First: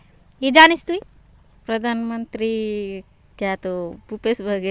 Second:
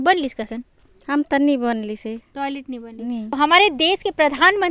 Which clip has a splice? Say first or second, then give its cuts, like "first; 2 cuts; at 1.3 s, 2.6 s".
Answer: second; 1 cut; at 3.4 s